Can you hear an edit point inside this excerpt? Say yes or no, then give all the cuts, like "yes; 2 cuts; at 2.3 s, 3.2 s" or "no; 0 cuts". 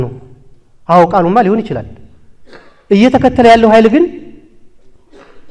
no; 0 cuts